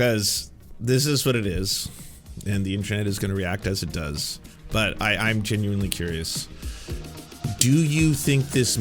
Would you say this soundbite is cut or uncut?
uncut